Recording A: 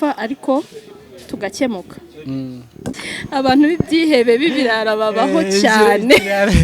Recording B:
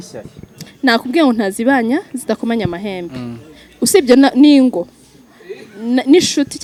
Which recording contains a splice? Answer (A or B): A